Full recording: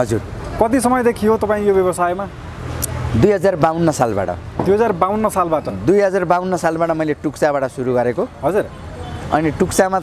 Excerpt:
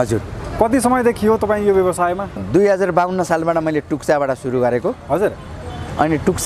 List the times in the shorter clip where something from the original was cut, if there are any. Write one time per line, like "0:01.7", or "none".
0:02.4